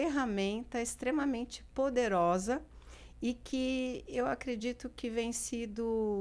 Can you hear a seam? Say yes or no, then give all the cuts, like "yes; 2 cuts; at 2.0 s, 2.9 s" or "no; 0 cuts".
no; 0 cuts